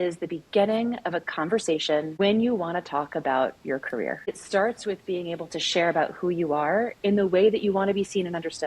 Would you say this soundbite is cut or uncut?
cut